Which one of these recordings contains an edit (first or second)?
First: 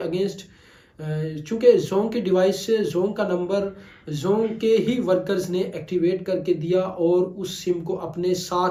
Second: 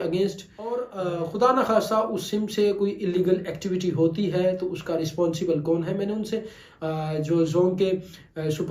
second